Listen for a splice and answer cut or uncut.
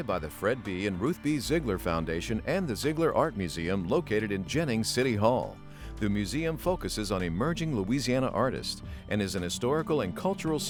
uncut